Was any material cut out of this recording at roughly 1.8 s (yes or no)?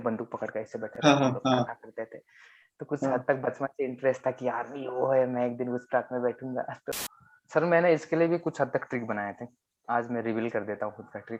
no